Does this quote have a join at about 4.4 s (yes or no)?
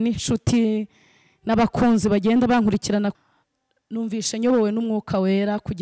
no